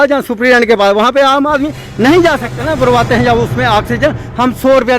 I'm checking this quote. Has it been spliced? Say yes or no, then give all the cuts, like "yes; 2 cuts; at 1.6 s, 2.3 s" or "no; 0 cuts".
yes; 1 cut; at 2.6 s